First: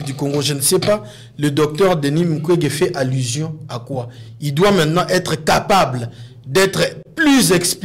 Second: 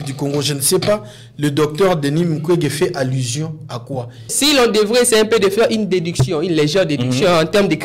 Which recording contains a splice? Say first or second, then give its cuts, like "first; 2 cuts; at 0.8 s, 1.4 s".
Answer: second; 1 cut; at 4.3 s